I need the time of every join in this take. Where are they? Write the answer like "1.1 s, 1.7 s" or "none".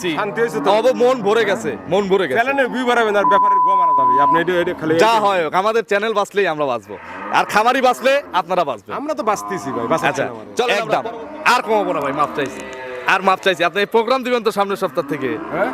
10.7 s